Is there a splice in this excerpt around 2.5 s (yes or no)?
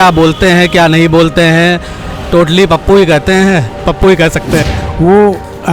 no